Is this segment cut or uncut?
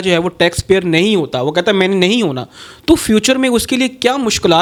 uncut